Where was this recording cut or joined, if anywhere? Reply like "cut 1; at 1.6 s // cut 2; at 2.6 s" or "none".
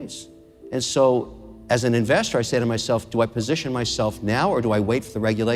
none